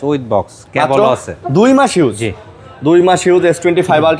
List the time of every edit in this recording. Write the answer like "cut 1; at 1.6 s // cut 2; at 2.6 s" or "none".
none

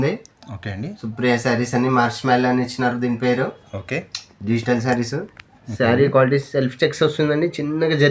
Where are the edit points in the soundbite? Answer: none

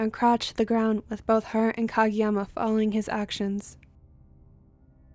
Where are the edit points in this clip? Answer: cut 1; at 3.6 s

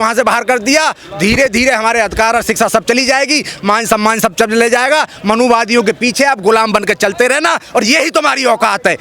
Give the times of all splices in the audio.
none

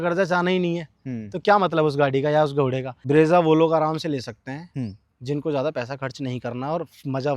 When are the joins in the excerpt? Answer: cut 1; at 2.9 s

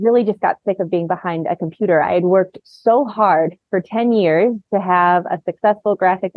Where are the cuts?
none

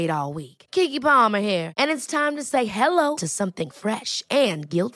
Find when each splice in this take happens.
none

